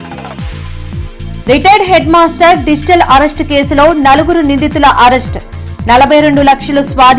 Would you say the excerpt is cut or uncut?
cut